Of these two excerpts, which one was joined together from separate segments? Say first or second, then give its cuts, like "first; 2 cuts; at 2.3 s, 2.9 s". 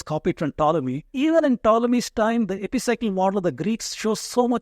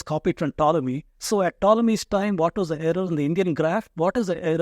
first; 1 cut; at 1.1 s